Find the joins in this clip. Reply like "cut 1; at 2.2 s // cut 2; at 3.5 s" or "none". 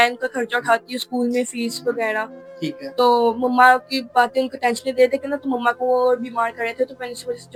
none

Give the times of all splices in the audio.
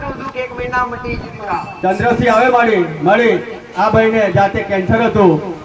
cut 1; at 1.7 s

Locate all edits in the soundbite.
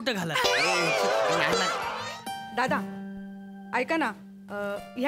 cut 1; at 1.9 s

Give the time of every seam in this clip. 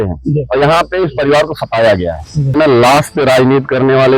cut 1; at 2.5 s

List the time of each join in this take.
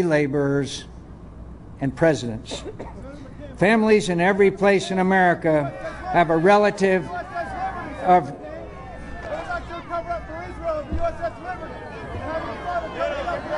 cut 1; at 11.7 s

